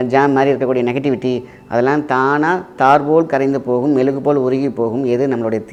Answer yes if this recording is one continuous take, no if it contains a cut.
yes